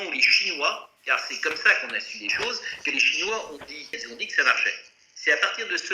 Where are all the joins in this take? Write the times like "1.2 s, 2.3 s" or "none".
4.0 s